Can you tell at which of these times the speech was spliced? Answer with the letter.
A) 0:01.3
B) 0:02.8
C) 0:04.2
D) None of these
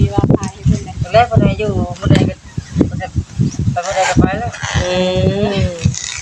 D